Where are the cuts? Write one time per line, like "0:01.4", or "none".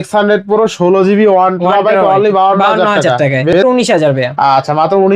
0:03.5